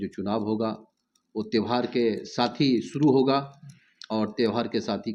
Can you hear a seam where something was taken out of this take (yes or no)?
no